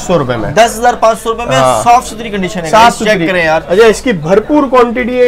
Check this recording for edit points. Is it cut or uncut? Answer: uncut